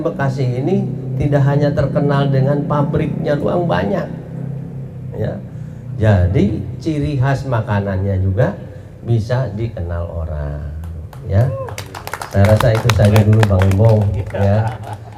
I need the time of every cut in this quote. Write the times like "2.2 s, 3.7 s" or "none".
none